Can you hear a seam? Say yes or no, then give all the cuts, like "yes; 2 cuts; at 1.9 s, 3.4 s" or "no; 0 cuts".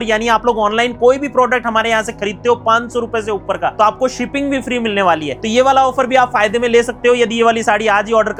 no; 0 cuts